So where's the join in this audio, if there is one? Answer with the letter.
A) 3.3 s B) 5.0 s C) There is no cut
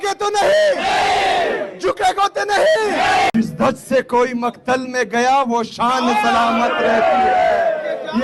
A